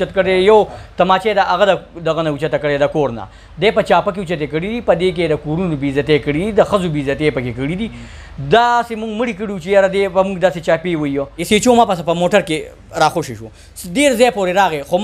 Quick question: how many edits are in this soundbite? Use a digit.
1